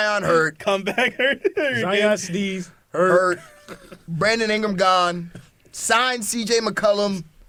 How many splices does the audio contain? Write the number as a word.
zero